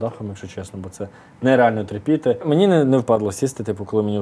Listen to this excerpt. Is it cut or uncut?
cut